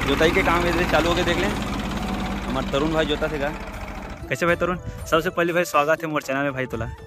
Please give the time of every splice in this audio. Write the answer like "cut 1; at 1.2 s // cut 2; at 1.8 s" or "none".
cut 1; at 4.1 s

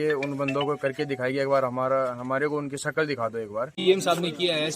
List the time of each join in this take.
cut 1; at 3.7 s

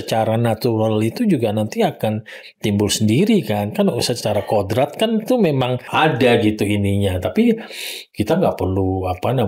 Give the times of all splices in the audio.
none

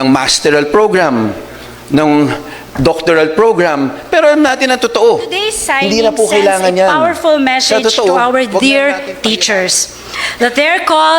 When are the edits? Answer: cut 1; at 6.9 s

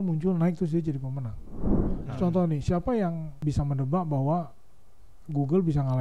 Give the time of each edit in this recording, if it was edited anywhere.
cut 1; at 2.0 s // cut 2; at 3.4 s

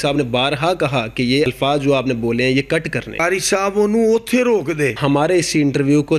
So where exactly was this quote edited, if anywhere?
cut 1; at 1.5 s // cut 2; at 3.2 s // cut 3; at 5.0 s

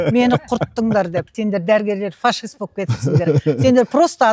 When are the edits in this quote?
cut 1; at 1.3 s

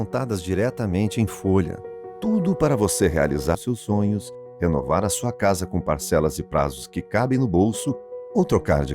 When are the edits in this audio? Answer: cut 1; at 3.6 s

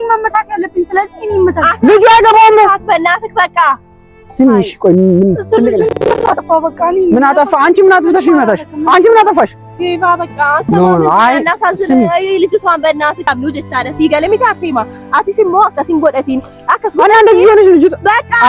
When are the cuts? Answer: cut 1; at 13.2 s

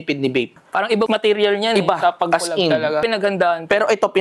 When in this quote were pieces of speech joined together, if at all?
cut 1; at 3.0 s

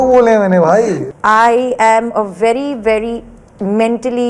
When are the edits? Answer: cut 1; at 1.1 s

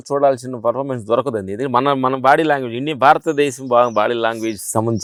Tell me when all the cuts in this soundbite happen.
none

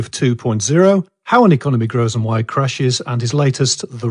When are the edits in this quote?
cut 1; at 2.2 s

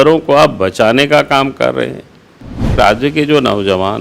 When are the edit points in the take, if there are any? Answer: cut 1; at 2.8 s

